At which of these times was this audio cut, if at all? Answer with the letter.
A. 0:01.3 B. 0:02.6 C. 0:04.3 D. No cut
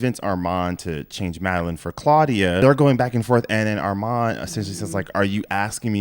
B